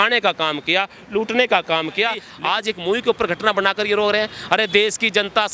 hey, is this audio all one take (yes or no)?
no